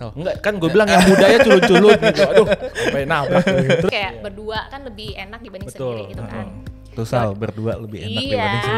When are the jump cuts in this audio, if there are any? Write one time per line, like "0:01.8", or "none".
0:03.9